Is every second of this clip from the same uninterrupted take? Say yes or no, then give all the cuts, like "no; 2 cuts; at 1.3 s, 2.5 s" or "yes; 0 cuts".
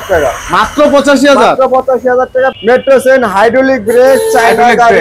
no; 1 cut; at 2.8 s